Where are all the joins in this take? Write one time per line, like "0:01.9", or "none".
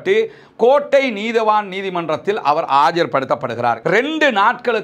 0:03.8

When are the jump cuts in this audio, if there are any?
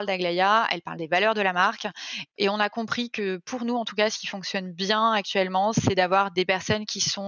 0:02.3
0:06.3

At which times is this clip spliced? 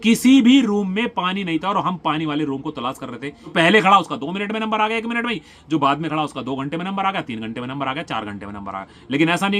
0:03.5

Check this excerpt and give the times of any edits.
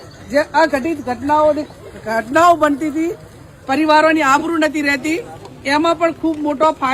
none

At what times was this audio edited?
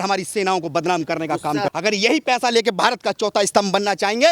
0:01.7

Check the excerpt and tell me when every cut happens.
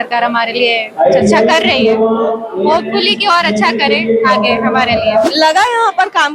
0:05.3

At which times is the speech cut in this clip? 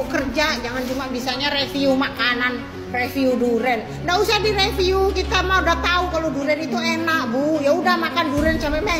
none

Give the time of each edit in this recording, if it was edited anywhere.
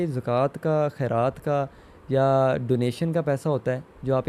none

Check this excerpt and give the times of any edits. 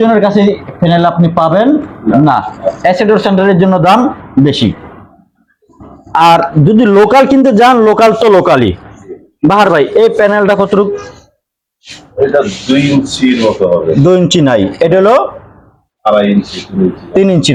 none

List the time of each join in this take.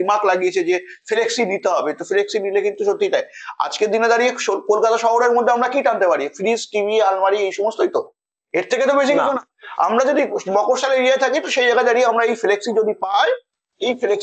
none

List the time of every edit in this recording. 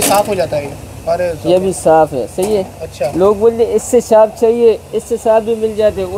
none

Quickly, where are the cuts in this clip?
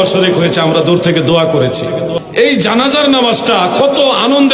0:02.2

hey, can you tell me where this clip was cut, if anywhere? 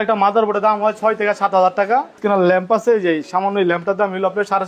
0:02.2

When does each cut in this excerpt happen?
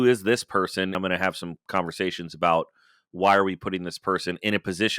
0:01.0

